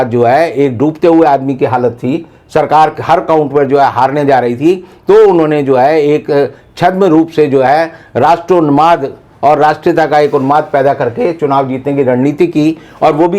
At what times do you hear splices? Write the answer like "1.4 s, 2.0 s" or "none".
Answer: none